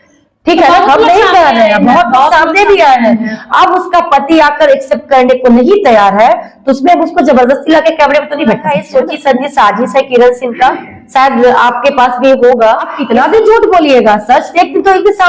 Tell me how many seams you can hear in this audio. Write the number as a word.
two